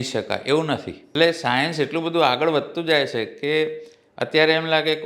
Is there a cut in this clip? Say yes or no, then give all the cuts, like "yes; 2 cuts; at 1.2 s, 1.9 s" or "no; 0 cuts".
yes; 1 cut; at 0.9 s